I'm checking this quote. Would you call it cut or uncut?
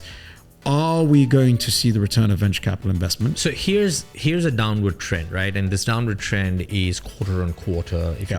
cut